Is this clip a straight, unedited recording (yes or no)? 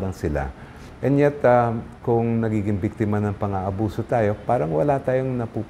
yes